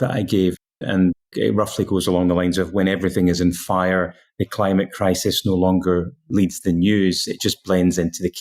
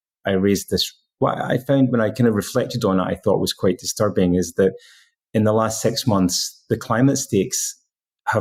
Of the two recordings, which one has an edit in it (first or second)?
first